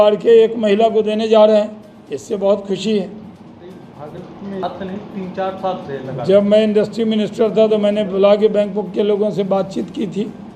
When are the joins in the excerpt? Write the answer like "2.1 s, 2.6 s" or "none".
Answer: none